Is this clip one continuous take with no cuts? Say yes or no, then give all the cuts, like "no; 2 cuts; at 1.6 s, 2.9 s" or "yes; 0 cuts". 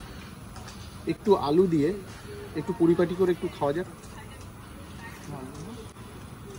yes; 0 cuts